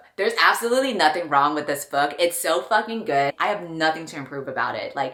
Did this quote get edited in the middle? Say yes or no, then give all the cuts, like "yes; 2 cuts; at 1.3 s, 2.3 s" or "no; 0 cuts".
no; 0 cuts